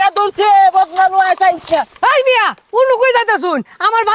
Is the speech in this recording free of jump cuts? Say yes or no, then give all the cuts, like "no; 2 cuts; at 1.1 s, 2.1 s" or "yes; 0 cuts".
yes; 0 cuts